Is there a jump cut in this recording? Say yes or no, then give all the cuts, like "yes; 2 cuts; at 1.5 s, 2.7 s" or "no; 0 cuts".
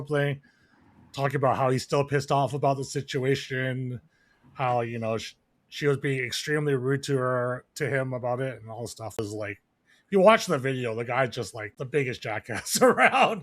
yes; 2 cuts; at 9.2 s, 11.6 s